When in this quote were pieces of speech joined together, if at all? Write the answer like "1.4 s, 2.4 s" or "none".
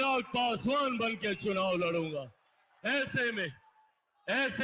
none